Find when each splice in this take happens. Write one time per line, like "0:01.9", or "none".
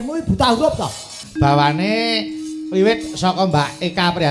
0:01.2